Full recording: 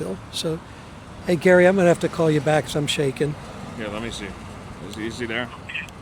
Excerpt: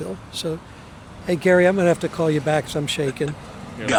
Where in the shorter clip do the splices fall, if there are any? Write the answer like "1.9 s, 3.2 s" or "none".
none